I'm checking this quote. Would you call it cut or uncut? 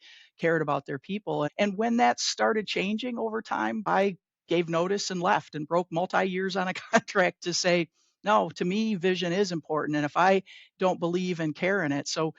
cut